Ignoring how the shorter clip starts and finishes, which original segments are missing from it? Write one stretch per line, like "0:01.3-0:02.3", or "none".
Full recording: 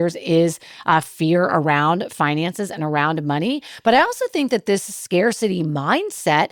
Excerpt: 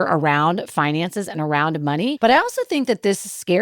0:03.6-0:03.8